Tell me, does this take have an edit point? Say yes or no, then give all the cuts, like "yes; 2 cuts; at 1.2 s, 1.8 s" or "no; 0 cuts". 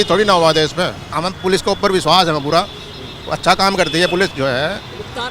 no; 0 cuts